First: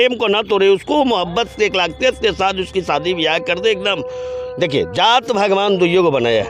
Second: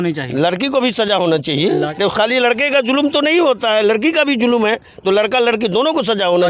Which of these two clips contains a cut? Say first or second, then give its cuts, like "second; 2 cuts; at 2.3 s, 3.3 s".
second; 1 cut; at 1.9 s